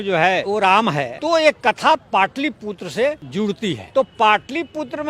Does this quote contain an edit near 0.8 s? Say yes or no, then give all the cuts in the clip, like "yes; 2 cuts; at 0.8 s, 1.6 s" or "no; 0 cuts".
yes; 2 cuts; at 0.8 s, 3.5 s